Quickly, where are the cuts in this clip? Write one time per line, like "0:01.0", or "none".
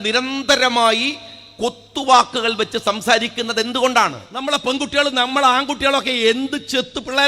0:04.3

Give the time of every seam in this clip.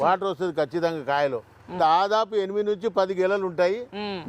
0:01.8

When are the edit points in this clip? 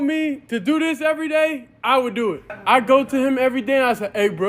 0:02.5

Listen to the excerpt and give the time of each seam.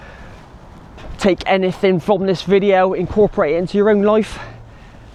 none

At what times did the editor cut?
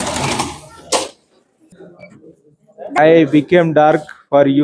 0:03.0

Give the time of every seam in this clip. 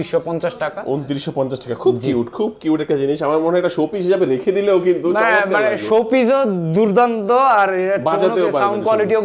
none

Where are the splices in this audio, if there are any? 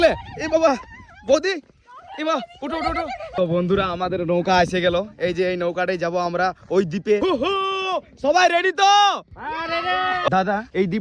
0:03.4
0:07.2
0:10.3

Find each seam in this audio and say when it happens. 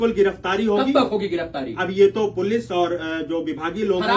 none

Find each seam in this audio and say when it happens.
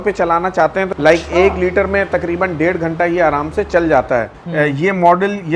0:00.9
0:04.4

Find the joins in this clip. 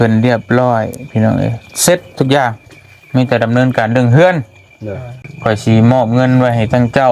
0:05.3

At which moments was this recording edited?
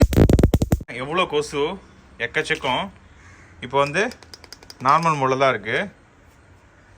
0:00.9

